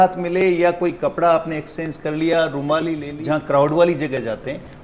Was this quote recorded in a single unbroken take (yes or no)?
no